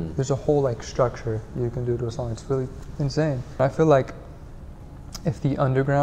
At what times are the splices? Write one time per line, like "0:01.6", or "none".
0:03.6